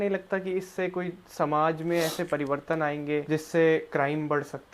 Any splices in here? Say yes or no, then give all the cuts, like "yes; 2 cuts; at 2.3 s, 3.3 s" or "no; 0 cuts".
yes; 1 cut; at 3.2 s